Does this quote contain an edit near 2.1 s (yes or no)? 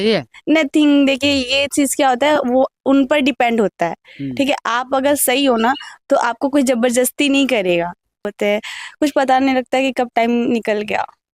no